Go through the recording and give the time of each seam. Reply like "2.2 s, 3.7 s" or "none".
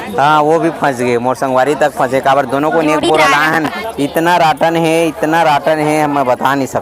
none